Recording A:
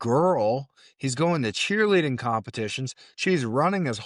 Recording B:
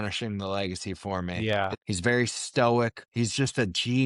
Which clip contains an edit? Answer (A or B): B